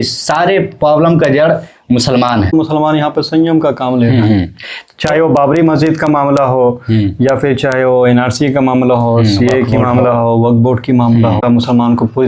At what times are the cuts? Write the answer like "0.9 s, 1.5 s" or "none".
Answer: 2.5 s, 11.4 s